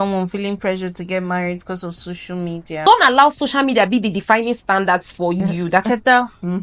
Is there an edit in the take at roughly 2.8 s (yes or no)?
yes